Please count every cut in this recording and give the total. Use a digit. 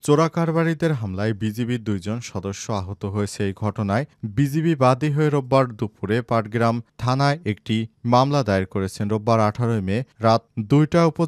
0